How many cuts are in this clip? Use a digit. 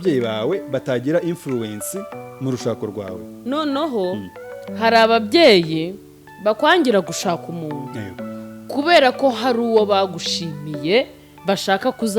0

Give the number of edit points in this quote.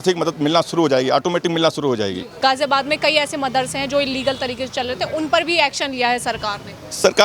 1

